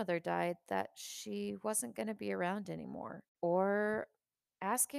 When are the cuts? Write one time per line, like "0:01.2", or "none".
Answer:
0:03.2